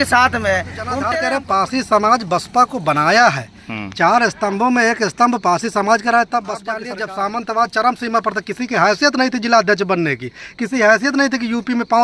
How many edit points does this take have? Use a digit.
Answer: 2